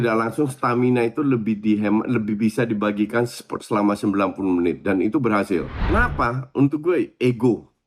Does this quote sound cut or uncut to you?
cut